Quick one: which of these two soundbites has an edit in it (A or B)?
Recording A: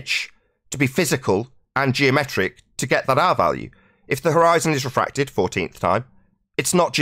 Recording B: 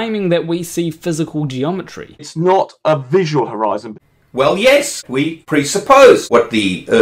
B